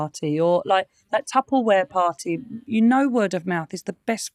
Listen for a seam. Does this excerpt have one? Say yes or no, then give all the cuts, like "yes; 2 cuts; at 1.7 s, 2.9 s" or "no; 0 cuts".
no; 0 cuts